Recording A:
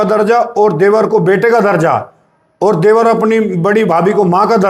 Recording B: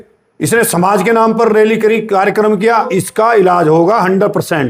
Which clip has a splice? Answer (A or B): B